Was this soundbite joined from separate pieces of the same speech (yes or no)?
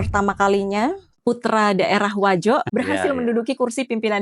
yes